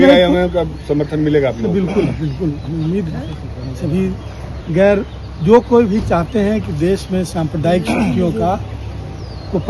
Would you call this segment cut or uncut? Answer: uncut